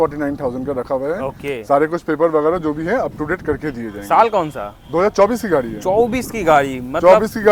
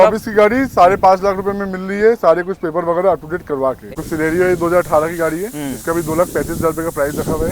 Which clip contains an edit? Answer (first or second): second